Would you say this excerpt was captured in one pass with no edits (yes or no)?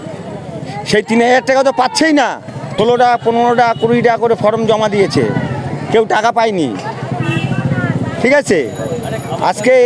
no